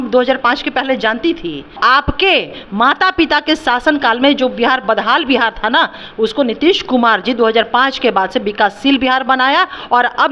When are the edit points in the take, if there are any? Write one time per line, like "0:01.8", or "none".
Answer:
0:01.7